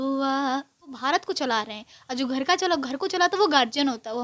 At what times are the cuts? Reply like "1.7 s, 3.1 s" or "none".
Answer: 1.0 s